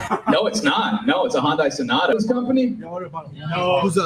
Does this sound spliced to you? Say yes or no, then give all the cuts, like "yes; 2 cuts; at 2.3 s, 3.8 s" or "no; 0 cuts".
yes; 1 cut; at 2.1 s